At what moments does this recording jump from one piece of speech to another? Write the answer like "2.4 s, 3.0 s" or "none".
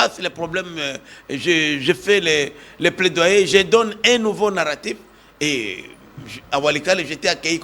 none